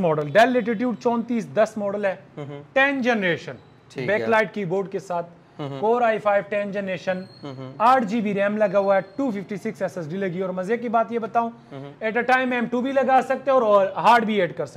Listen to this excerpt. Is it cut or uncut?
uncut